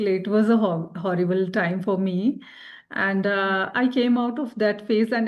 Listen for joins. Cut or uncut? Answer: uncut